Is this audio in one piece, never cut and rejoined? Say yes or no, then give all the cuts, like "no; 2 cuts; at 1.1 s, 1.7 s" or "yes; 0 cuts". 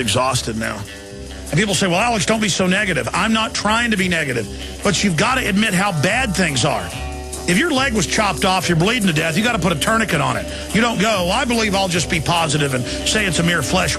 yes; 0 cuts